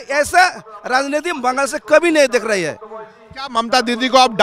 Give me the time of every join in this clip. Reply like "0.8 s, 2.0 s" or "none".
none